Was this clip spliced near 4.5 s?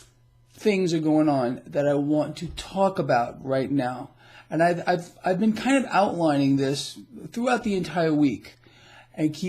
no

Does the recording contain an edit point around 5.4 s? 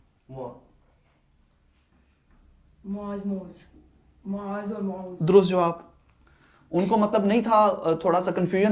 no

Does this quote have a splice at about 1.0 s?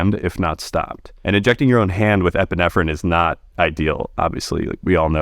yes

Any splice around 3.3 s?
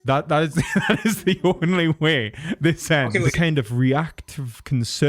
yes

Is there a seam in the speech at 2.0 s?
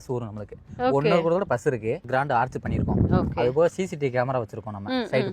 yes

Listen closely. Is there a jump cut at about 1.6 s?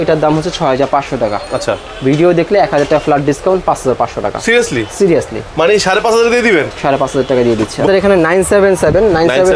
no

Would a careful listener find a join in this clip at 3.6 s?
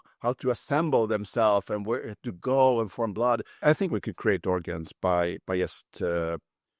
yes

